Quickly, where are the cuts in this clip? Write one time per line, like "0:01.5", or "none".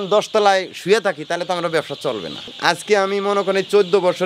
0:02.5

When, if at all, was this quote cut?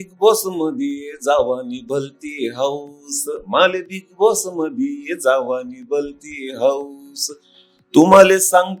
none

